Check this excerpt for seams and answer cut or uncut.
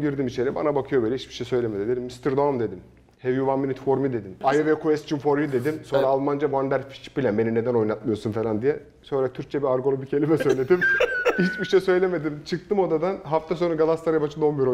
cut